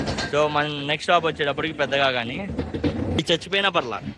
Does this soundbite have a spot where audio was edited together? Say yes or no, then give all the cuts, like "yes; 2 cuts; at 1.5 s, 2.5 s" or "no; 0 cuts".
yes; 1 cut; at 3.2 s